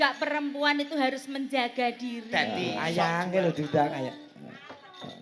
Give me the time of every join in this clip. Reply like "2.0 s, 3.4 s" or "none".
2.8 s